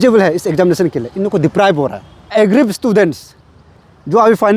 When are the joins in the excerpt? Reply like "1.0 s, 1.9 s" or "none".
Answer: 2.3 s